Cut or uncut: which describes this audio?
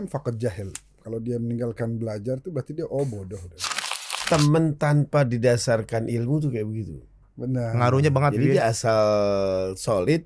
cut